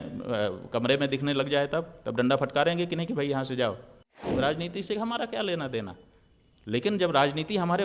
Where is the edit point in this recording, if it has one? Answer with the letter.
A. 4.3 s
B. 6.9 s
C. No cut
A